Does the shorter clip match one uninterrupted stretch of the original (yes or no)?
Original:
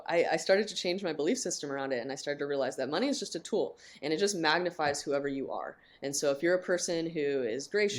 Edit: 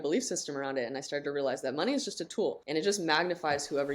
no